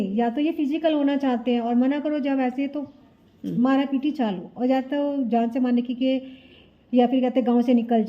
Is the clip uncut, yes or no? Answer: yes